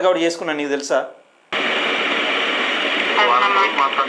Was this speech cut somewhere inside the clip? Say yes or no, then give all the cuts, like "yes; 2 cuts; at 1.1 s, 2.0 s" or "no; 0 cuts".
yes; 1 cut; at 1.5 s